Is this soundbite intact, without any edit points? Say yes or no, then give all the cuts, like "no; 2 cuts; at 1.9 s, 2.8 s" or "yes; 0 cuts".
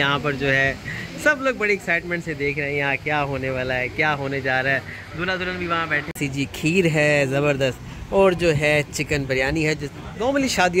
no; 1 cut; at 6.1 s